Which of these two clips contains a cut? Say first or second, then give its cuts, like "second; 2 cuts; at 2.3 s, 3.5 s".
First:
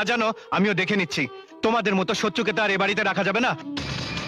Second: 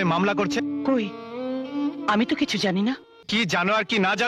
second; 2 cuts; at 0.8 s, 3.1 s